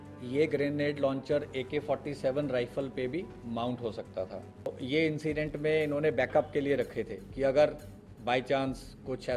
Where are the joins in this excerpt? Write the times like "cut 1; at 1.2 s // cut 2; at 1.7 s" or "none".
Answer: cut 1; at 4.7 s